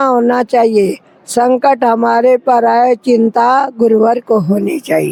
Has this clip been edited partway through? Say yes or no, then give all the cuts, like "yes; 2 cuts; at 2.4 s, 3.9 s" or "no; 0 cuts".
no; 0 cuts